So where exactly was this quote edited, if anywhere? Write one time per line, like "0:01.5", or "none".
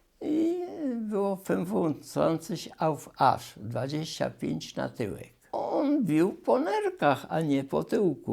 0:05.6